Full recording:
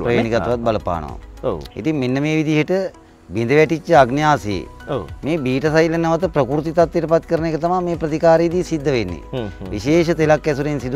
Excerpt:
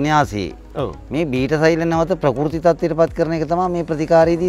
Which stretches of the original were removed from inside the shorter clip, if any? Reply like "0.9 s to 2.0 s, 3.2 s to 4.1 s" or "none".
none